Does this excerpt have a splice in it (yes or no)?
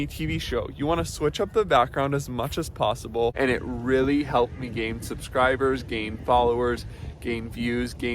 yes